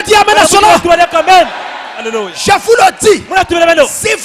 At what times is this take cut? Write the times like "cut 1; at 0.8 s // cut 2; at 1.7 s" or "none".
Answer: none